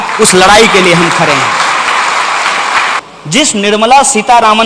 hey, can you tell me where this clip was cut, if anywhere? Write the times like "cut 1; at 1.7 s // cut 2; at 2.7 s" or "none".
cut 1; at 3.0 s